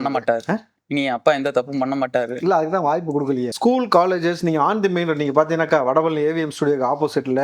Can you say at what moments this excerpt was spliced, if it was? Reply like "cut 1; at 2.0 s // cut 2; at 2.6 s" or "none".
cut 1; at 3.5 s